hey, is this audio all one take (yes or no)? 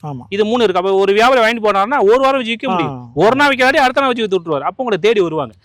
yes